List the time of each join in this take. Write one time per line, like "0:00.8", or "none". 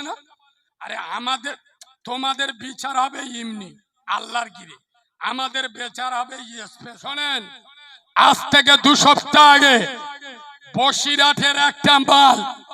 0:07.0